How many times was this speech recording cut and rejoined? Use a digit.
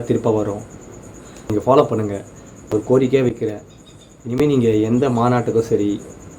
2